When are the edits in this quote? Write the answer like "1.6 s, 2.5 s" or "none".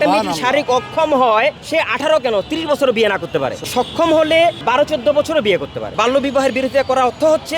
1.6 s, 3.7 s, 4.6 s, 5.9 s